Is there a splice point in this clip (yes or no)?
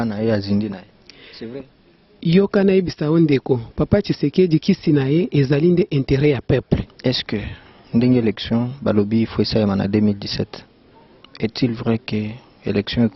yes